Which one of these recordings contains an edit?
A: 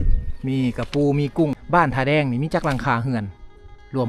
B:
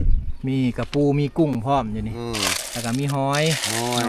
A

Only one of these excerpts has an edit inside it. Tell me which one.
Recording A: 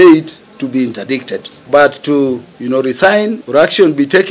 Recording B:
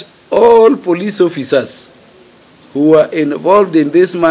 A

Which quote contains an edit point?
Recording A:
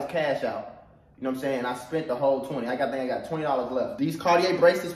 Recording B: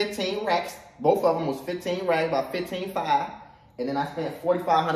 A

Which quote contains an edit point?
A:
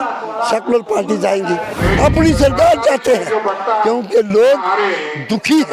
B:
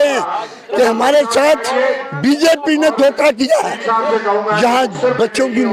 A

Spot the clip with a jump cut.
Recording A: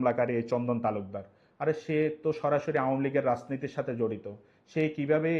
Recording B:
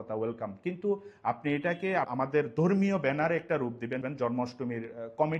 B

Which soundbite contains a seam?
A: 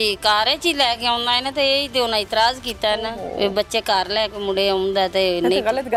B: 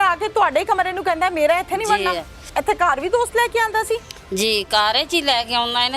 B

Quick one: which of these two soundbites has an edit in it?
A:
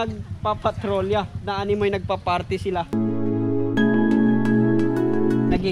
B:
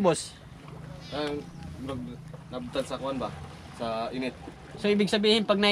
A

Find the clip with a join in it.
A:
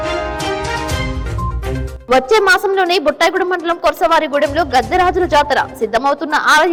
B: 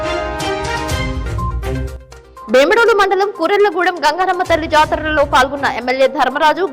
B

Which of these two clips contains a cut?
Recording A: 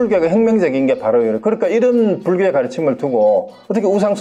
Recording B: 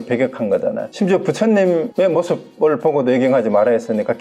B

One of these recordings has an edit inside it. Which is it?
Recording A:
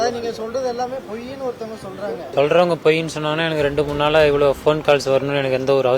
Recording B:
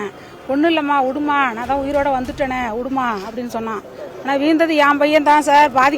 A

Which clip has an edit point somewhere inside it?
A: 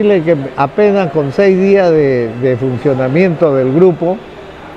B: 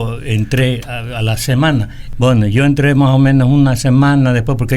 B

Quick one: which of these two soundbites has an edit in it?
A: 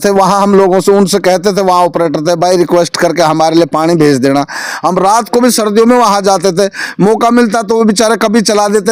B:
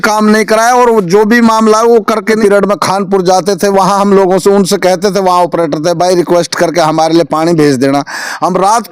B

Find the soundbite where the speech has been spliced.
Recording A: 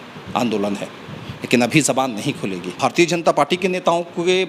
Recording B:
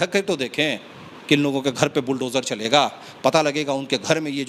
A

